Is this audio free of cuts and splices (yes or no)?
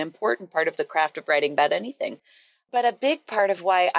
yes